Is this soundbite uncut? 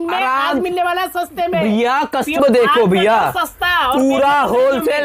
no; 1 cut; at 2.4 s

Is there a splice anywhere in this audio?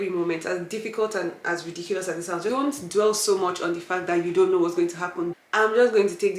yes; 2 cuts; at 2.5 s, 5.3 s

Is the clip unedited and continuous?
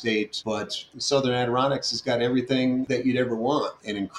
no; 2 cuts; at 0.7 s, 2.9 s

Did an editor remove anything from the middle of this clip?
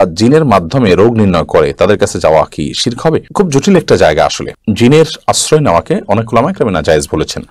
no; 0 cuts

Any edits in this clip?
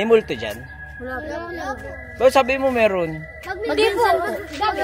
no; 0 cuts

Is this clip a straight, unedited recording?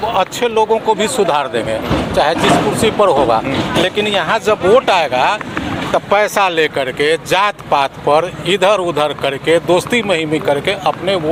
yes; 0 cuts

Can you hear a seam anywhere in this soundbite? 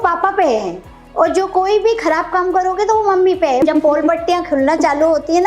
yes; 1 cut; at 3.6 s

